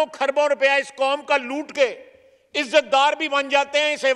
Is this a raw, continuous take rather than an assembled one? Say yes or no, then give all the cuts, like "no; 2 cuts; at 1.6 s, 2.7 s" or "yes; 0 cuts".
yes; 0 cuts